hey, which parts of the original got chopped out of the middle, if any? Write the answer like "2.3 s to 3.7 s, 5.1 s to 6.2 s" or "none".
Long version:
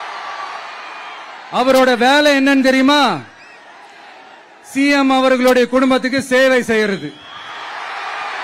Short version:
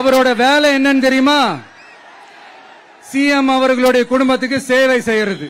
none